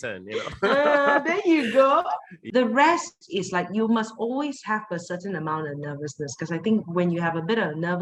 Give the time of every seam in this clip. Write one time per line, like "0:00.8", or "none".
0:02.3